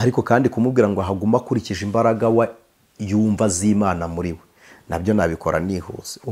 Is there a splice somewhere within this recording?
no; 0 cuts

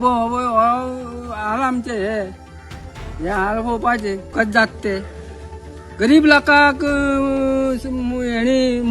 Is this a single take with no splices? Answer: no; 1 cut; at 4.3 s

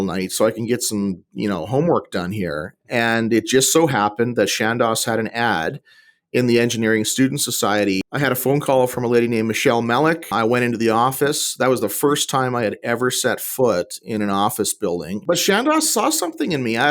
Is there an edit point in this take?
yes; 2 cuts; at 8.0 s, 15.2 s

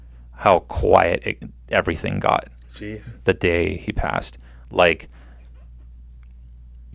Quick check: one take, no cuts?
yes; 0 cuts

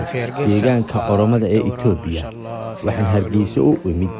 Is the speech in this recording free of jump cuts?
yes; 0 cuts

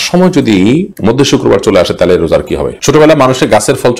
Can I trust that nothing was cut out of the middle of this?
no; 2 cuts; at 0.9 s, 2.7 s

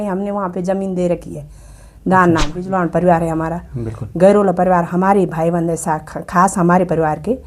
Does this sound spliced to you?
yes; 1 cut; at 2.6 s

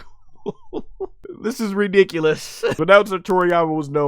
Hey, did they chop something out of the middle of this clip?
yes; 2 cuts; at 1.2 s, 2.8 s

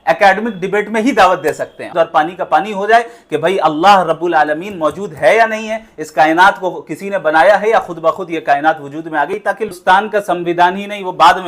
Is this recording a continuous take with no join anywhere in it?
no; 2 cuts; at 1.9 s, 9.7 s

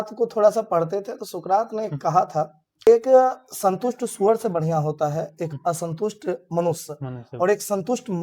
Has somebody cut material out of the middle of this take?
yes; 1 cut; at 2.9 s

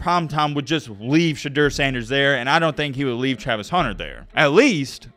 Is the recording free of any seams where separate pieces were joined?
yes; 0 cuts

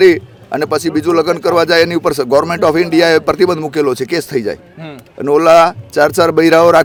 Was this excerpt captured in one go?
yes; 0 cuts

